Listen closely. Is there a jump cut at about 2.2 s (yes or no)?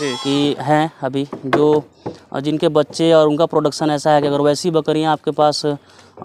no